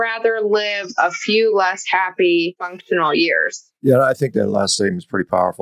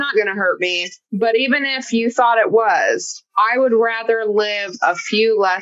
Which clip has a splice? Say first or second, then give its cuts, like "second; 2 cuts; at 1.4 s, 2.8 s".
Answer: first; 1 cut; at 2.8 s